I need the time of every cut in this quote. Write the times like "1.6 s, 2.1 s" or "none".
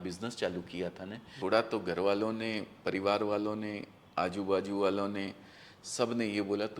1.3 s

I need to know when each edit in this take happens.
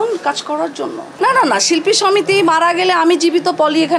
1.1 s

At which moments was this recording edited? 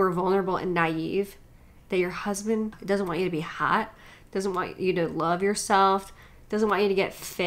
none

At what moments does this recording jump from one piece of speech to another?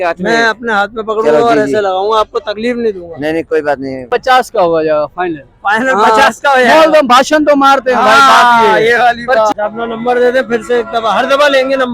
4.1 s, 9.5 s

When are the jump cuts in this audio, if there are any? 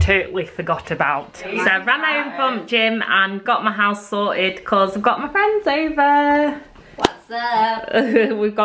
1.4 s

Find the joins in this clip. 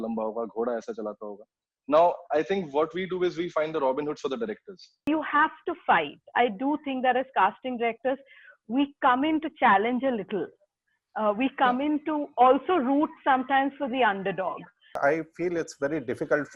5.1 s, 15.0 s

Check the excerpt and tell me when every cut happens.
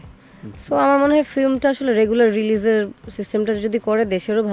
none

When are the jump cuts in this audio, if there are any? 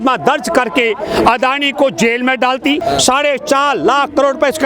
2.8 s

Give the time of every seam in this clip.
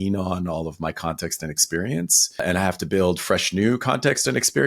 2.4 s

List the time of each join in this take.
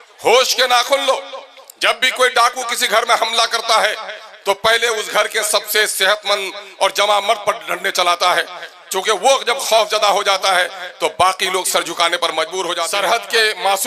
12.8 s

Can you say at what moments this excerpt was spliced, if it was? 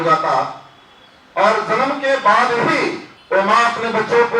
3.1 s

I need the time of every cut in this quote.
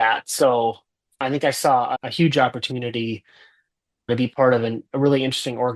2.0 s, 4.1 s

